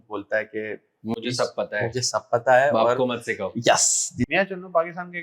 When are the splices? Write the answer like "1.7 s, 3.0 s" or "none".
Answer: 4.3 s